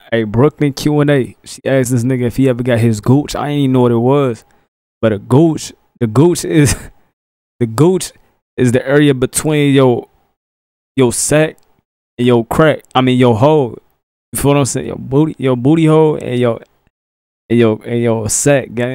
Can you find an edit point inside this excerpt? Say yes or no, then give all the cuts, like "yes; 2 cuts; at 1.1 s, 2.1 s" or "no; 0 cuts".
no; 0 cuts